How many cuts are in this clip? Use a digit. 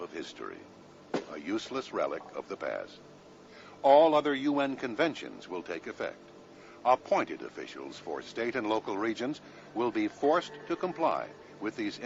0